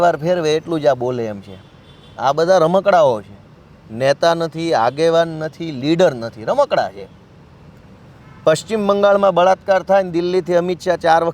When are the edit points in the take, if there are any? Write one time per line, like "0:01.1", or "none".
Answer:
none